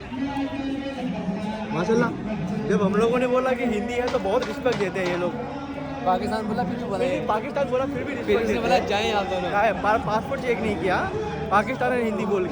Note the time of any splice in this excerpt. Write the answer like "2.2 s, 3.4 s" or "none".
none